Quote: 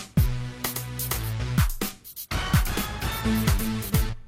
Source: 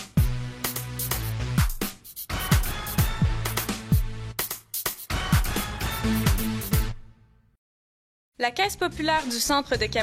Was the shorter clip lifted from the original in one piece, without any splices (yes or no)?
no